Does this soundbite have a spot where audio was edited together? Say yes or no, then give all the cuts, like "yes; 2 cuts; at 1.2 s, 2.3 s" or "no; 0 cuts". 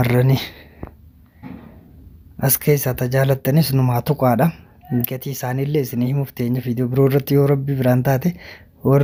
no; 0 cuts